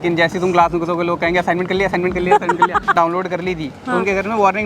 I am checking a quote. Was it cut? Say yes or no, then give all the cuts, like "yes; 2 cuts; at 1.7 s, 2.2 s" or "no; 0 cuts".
yes; 1 cut; at 2.9 s